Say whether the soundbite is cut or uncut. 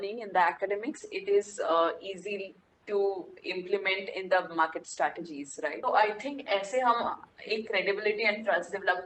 cut